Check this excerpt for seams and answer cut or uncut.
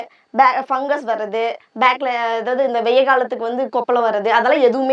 uncut